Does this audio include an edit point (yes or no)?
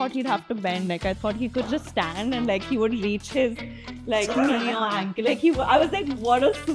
no